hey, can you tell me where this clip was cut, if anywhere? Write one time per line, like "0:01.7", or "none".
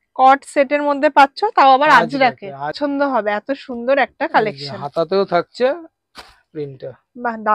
0:02.8